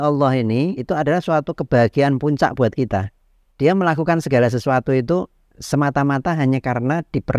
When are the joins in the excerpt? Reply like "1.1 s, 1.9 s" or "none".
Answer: none